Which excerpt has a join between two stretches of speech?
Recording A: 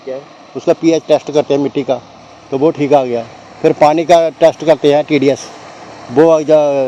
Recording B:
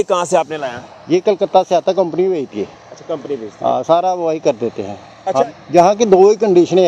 B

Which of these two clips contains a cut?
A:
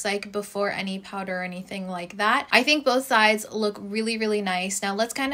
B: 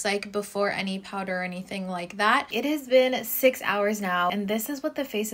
B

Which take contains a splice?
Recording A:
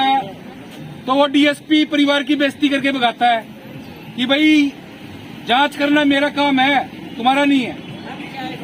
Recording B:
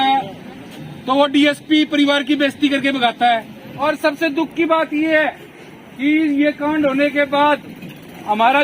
B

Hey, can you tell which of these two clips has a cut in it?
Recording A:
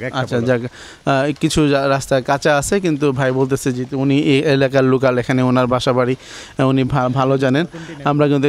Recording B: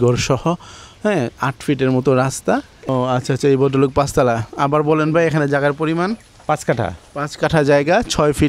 B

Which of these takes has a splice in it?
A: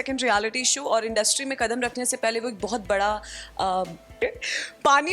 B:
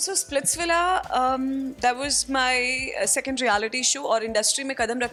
A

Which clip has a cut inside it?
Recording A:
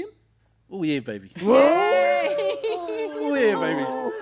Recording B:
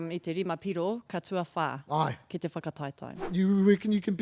B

